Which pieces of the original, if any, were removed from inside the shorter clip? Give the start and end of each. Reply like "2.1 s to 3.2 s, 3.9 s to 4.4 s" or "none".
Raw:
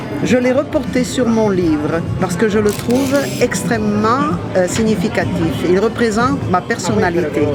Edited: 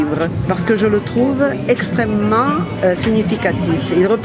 none